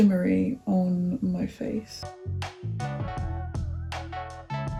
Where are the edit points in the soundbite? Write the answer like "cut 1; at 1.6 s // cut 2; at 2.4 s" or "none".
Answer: none